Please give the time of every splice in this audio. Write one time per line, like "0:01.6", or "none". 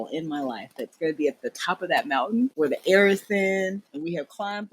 0:02.5